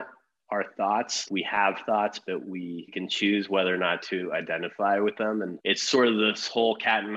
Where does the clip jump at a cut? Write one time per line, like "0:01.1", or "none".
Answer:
0:01.2
0:02.9
0:05.5